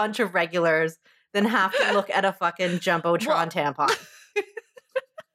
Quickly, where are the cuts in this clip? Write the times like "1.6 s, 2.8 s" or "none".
4.2 s

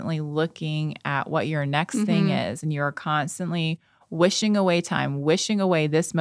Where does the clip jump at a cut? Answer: none

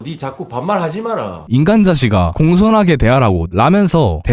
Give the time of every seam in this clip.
1.4 s, 3.4 s

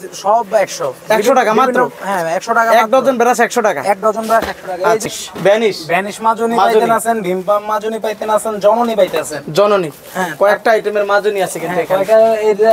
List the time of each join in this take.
5.0 s

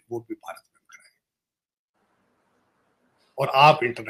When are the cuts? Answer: none

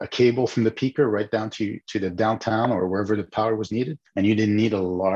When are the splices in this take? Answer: 4.0 s

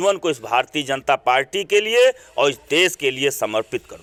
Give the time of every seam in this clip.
none

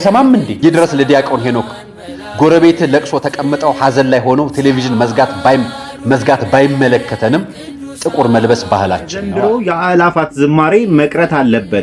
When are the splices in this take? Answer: 9.3 s

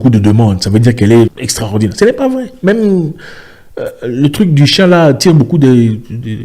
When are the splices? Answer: 1.4 s

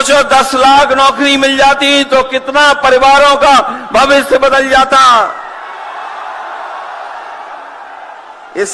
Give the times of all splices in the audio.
none

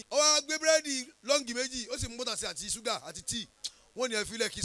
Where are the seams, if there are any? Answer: none

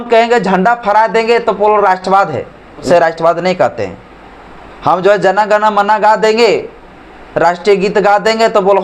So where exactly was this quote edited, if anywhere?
2.8 s

